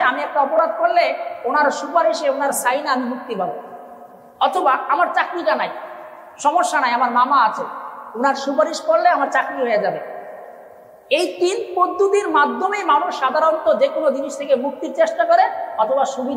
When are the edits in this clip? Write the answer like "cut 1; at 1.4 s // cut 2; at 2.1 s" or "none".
none